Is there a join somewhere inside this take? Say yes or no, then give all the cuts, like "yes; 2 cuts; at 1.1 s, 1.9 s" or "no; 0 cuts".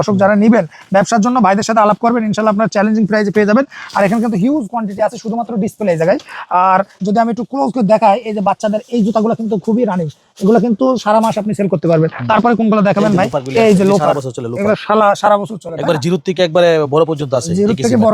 no; 0 cuts